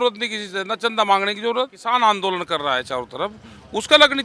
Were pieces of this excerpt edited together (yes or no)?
yes